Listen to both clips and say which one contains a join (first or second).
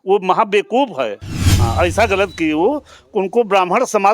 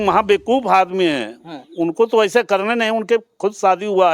first